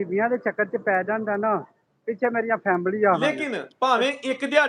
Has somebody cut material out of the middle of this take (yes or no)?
yes